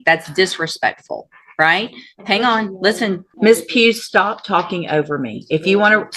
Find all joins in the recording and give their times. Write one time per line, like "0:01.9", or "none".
0:03.3

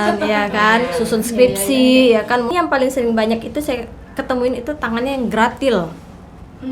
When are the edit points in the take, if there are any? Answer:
0:02.5

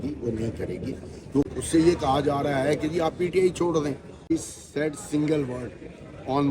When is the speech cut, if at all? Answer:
0:01.5
0:04.4

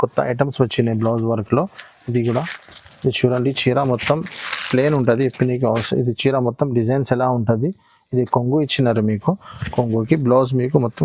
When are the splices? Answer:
none

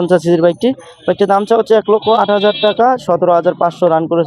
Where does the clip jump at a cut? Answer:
none

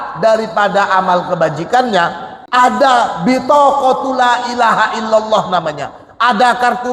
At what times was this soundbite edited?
0:02.4

